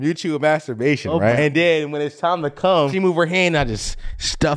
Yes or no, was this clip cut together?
yes